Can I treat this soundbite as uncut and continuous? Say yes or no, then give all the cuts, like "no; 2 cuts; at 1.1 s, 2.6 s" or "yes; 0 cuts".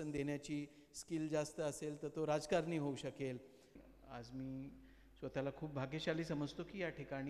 no; 1 cut; at 3.8 s